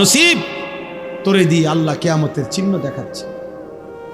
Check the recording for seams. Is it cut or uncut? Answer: cut